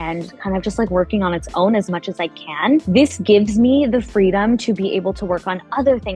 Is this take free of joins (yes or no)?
yes